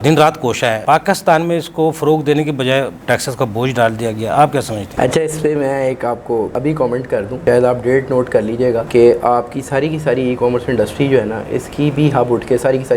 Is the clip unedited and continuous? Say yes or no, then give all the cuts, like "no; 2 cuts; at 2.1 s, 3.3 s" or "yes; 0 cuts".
yes; 0 cuts